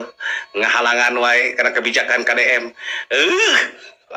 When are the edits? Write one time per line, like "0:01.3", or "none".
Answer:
none